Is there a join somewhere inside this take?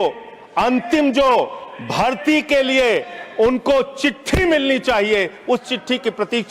no; 0 cuts

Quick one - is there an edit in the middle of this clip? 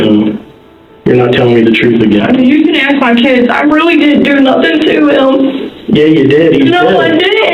no; 0 cuts

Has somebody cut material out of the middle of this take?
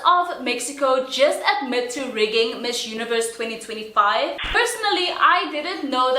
yes; 1 cut; at 4.5 s

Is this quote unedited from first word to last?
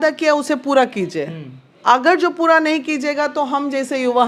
yes; 0 cuts

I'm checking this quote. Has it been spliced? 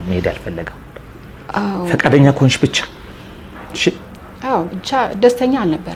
no; 0 cuts

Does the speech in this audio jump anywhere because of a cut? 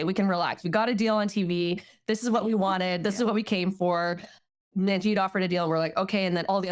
no; 0 cuts

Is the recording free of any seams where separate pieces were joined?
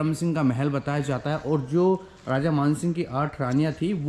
yes; 0 cuts

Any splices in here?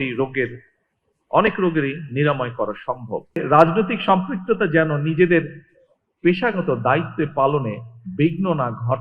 yes; 1 cut; at 3.4 s

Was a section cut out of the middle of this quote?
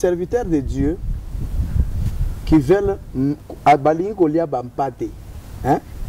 no; 0 cuts

